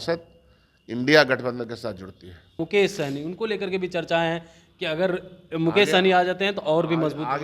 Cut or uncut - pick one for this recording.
cut